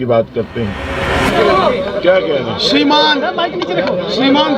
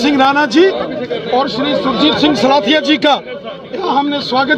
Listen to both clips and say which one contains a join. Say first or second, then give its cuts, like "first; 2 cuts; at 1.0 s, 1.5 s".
first; 1 cut; at 1.2 s